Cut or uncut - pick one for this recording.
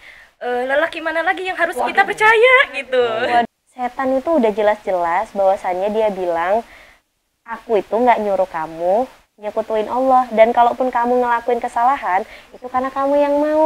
cut